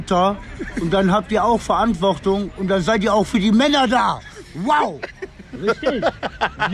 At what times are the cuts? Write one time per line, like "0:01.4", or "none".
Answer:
none